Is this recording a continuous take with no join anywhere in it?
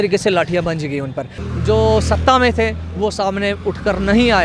no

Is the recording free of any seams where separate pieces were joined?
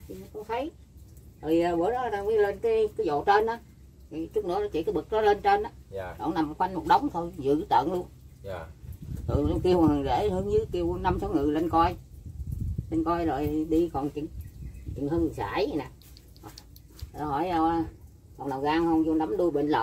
yes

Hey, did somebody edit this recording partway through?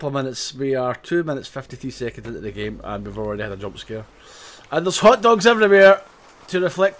no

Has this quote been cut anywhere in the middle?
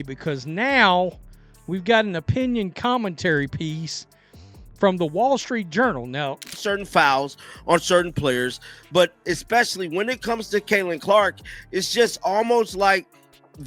yes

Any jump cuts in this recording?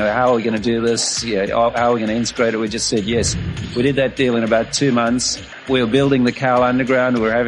yes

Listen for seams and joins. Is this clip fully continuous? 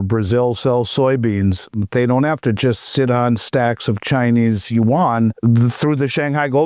no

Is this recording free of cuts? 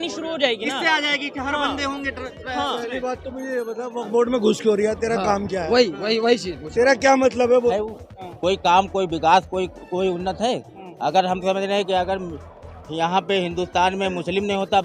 no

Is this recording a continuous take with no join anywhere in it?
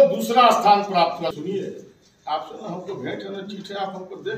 no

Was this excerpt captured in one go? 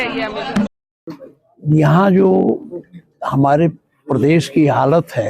yes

